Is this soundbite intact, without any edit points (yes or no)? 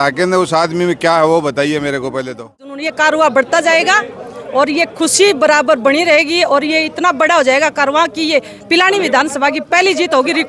no